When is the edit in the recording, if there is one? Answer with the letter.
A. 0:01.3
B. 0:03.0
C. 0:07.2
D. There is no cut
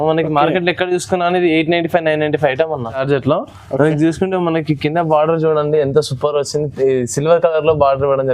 B